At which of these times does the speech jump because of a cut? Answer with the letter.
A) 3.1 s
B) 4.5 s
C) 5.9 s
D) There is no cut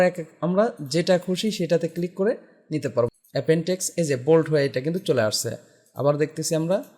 A